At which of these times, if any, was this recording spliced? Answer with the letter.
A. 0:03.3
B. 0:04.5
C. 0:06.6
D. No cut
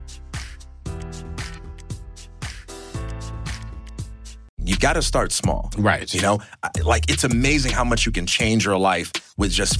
B